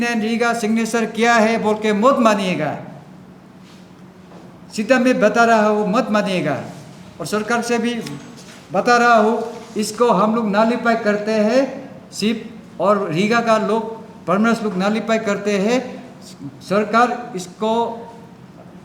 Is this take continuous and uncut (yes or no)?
yes